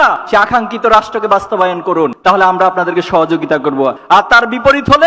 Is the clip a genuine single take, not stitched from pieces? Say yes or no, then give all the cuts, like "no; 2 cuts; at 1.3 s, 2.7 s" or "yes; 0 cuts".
yes; 0 cuts